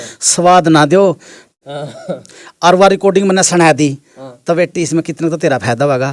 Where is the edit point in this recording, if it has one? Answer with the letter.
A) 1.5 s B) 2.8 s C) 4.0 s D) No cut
A